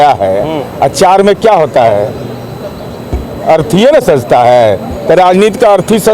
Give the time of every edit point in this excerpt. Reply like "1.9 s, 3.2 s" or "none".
none